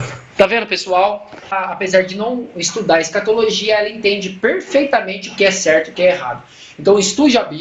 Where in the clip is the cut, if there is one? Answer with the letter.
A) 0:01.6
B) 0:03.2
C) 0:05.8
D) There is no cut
A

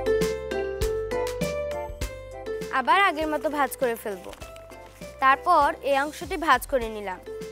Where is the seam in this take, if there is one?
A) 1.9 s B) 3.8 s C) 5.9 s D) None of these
D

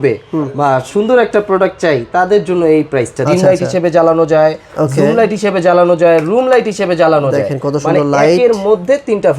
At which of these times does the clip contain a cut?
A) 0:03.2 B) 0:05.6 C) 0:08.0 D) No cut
A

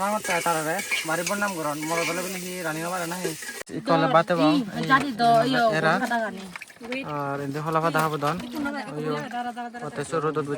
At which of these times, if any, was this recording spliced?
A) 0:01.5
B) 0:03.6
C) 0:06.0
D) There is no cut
B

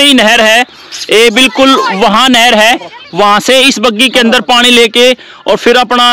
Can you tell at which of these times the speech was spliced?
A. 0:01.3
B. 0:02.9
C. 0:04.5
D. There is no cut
D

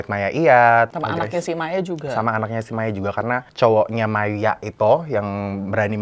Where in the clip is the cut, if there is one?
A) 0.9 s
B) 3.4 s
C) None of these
A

